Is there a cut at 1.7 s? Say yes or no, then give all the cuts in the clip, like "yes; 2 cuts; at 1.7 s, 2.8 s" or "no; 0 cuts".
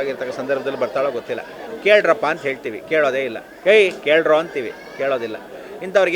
yes; 1 cut; at 1.7 s